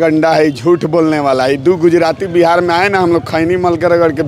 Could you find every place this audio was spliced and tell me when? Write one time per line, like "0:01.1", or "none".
none